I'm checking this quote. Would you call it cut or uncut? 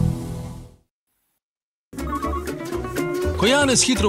cut